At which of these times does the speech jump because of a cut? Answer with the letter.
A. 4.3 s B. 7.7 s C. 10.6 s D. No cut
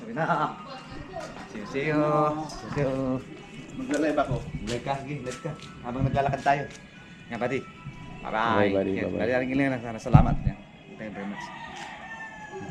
D